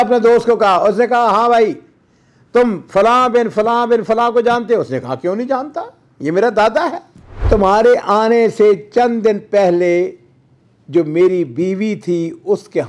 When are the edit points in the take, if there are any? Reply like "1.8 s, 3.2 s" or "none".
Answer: 7.4 s